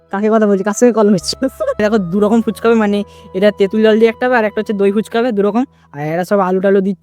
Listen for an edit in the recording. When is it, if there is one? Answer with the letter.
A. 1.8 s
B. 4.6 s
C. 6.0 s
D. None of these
A